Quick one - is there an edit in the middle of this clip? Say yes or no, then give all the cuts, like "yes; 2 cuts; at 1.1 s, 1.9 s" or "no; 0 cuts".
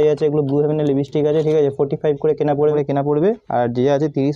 yes; 1 cut; at 2.7 s